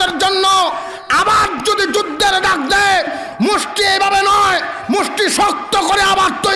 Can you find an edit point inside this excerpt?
no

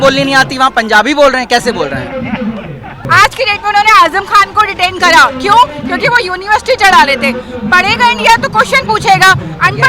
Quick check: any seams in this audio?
yes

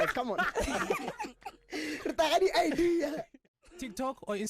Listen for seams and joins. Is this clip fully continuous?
no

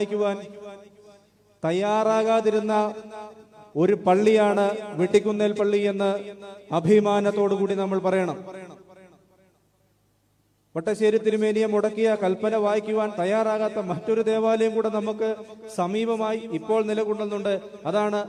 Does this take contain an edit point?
no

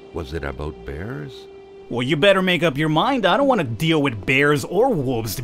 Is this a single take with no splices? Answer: no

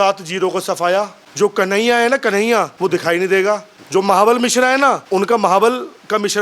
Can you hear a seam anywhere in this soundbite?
yes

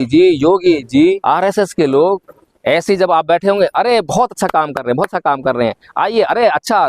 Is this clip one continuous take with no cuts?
no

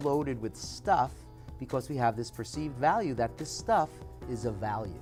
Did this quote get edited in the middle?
no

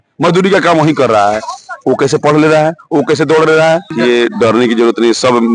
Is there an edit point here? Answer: yes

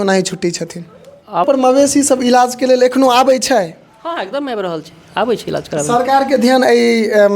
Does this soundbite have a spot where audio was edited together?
yes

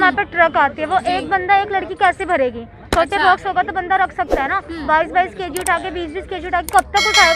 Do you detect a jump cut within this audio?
no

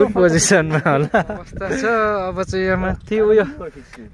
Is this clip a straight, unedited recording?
no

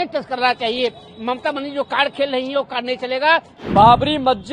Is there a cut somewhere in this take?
yes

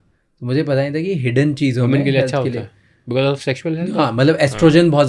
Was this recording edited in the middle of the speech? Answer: no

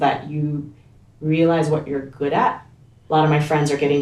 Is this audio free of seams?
no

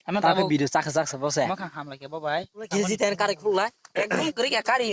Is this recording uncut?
no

